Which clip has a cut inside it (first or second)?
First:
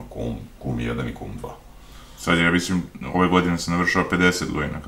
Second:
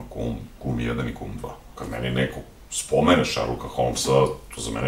second